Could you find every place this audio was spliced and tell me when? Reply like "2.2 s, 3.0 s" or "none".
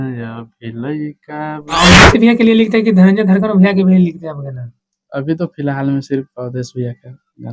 1.8 s